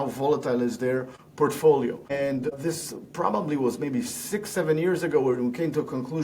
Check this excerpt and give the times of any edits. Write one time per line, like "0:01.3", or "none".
0:01.2
0:02.4